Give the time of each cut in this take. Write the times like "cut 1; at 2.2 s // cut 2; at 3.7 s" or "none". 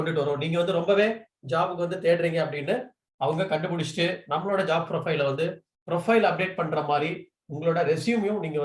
cut 1; at 5.7 s